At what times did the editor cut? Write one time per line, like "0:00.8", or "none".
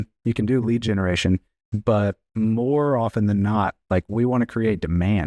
0:02.2